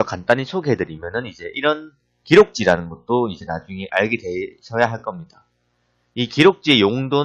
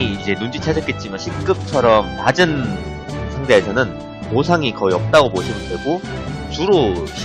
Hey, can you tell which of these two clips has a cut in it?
second; 1 cut; at 5.4 s

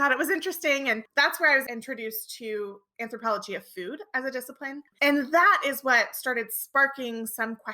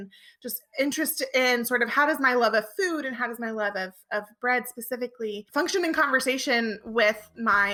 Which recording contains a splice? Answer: first; 2 cuts; at 1.6 s, 4.9 s

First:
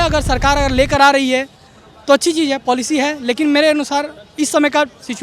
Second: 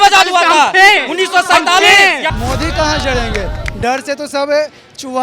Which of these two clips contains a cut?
second; 1 cut; at 2.3 s

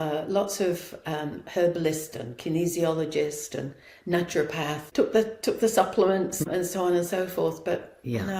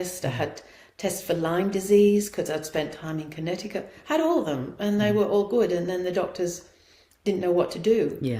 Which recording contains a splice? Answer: first; 2 cuts; at 4.8 s, 6.4 s

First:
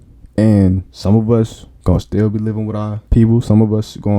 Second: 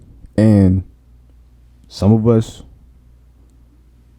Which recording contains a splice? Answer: first; 3 cuts; at 0.9 s, 1.6 s, 3.0 s

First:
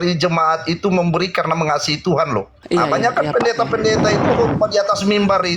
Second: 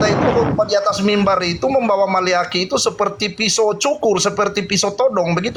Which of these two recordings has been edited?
first; 1 cut; at 2.6 s

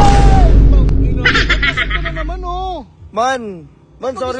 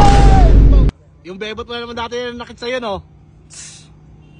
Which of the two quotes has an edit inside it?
second; 1 cut; at 0.9 s

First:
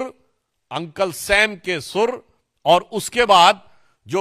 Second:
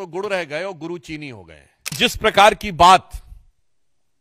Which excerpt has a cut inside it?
second; 1 cut; at 2.0 s

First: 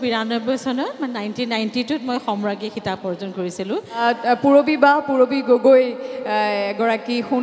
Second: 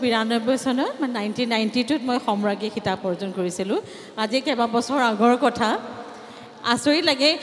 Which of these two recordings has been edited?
first; 1 cut; at 4.0 s

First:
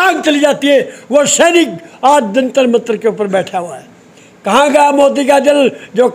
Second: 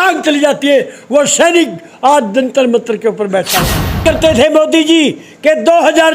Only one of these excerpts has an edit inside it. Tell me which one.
second; 1 cut; at 4.0 s

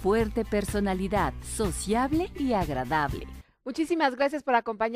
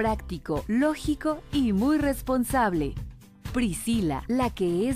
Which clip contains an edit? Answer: second; 1 cut; at 3.4 s

